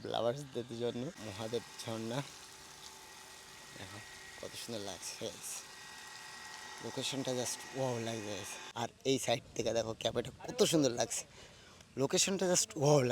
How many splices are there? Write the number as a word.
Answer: two